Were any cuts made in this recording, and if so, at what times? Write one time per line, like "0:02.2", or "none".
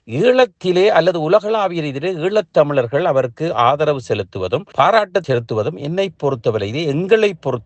0:04.7
0:05.2